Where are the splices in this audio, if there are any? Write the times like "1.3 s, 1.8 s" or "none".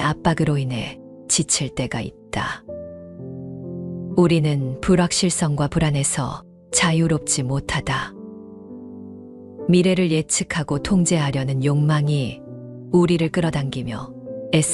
none

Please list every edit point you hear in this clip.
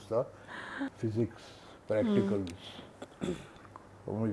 0.9 s

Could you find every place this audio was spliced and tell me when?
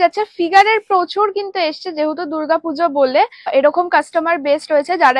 3.5 s

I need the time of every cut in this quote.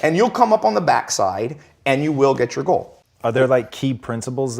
3.0 s

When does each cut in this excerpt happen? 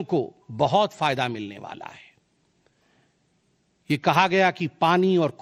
none

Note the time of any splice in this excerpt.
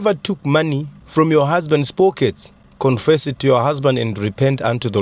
none

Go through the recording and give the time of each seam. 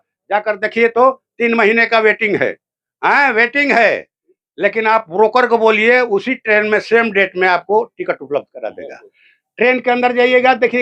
none

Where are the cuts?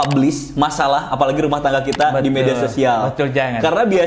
none

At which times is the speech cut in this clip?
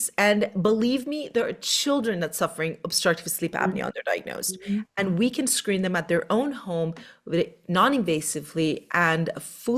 none

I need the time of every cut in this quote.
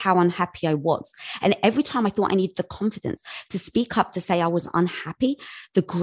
none

